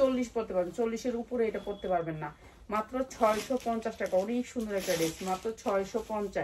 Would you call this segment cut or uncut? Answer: uncut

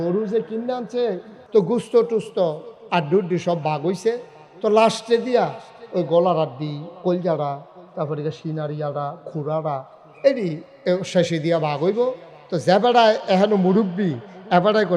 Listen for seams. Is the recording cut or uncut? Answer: cut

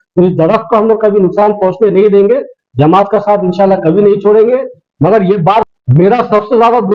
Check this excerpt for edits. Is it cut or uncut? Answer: cut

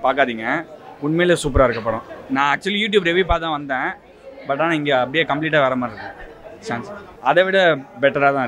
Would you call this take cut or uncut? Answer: uncut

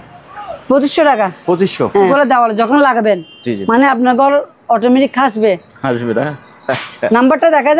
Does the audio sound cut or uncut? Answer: cut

